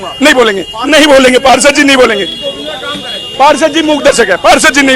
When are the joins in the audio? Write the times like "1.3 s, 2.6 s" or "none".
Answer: none